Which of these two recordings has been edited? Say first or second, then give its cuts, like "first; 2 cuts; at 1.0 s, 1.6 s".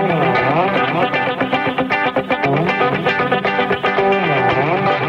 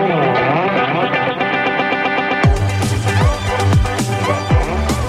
first; 1 cut; at 1.3 s